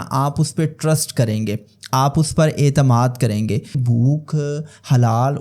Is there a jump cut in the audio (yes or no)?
yes